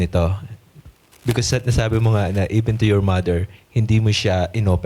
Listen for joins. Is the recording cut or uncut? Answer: uncut